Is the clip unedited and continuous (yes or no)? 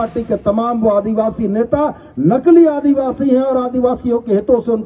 yes